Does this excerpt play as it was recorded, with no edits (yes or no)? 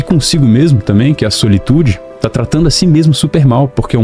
yes